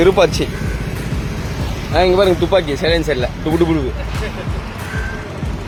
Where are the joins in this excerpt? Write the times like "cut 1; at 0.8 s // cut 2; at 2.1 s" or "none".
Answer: none